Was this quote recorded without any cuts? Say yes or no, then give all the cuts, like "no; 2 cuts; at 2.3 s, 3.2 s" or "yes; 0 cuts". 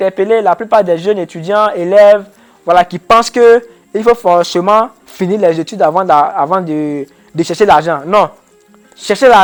yes; 0 cuts